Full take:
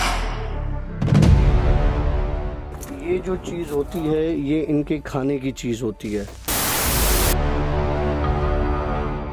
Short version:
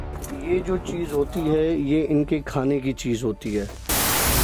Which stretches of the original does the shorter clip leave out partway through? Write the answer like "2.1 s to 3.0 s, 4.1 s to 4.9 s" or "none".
none